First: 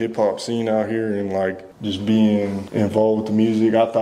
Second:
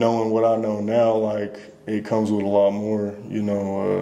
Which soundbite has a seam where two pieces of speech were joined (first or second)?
first